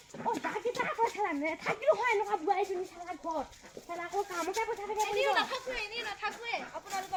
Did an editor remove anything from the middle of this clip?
no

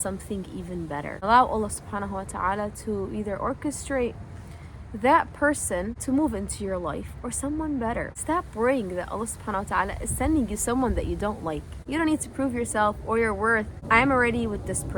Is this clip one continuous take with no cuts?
no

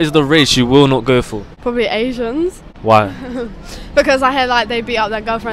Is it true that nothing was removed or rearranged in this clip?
no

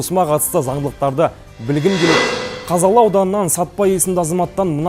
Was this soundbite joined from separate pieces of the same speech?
yes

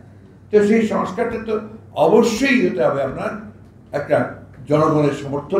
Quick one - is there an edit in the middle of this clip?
no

